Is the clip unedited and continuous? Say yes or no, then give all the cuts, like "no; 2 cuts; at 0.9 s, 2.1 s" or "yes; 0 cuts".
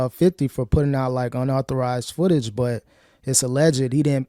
yes; 0 cuts